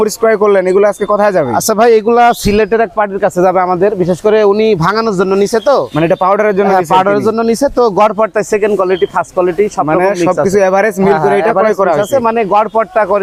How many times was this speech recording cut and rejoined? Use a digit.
0